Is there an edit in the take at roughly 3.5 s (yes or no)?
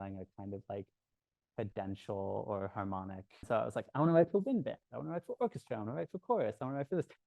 yes